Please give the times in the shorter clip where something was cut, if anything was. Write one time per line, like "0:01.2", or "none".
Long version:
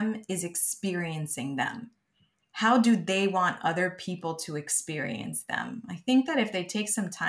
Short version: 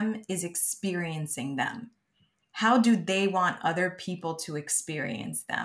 none